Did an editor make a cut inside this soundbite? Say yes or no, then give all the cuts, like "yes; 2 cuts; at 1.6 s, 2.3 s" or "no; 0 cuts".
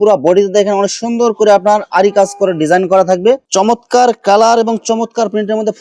yes; 1 cut; at 3.5 s